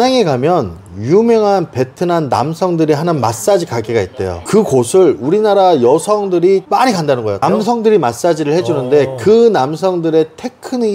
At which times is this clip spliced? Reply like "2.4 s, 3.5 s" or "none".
7.4 s